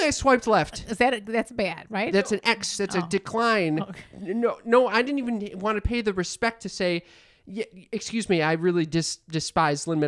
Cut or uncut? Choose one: cut